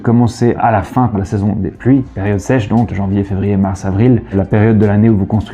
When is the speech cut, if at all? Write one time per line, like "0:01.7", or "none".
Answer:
0:01.1
0:02.9
0:04.3